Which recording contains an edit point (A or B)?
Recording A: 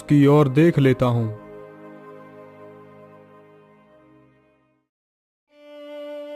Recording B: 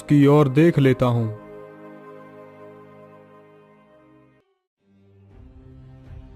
B